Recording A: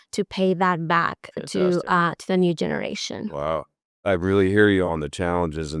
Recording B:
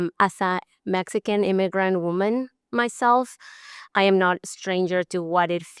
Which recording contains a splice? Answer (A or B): A